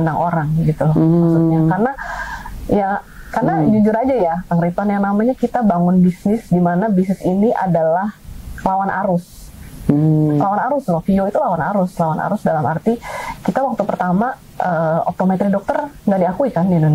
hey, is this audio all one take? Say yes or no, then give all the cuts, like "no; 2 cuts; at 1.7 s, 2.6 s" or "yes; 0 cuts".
yes; 0 cuts